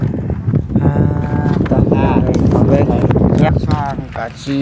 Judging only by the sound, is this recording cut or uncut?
cut